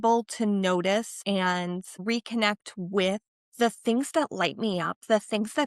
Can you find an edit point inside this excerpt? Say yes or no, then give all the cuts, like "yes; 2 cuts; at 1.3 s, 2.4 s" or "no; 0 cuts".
yes; 2 cuts; at 1.3 s, 3.4 s